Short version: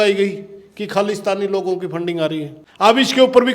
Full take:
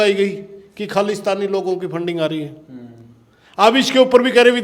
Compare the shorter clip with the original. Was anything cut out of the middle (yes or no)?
yes